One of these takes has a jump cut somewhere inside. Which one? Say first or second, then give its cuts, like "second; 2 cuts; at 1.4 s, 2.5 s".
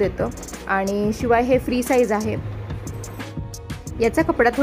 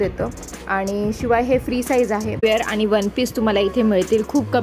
second; 1 cut; at 2.4 s